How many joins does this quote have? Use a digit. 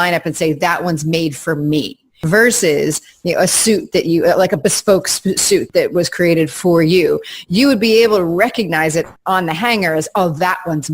3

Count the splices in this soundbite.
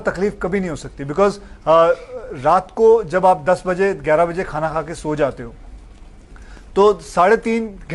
0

